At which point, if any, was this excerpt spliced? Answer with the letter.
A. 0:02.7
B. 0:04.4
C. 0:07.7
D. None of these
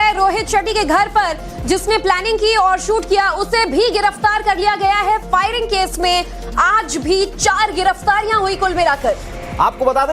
B